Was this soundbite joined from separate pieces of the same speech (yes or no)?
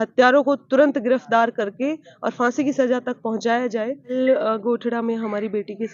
yes